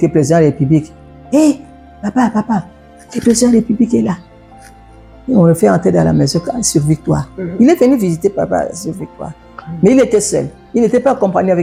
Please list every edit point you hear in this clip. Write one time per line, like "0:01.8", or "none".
none